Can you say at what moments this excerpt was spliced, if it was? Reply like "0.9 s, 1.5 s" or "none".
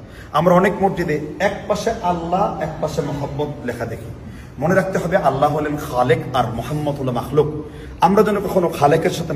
none